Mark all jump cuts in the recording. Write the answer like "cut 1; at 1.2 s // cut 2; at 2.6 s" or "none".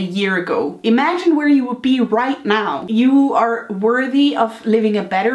cut 1; at 2.8 s